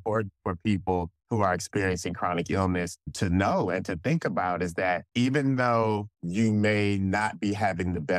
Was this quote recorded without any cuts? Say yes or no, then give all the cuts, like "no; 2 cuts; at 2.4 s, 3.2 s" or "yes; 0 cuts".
no; 1 cut; at 5.1 s